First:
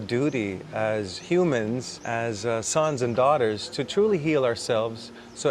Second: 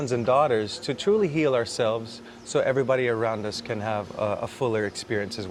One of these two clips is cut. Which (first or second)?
first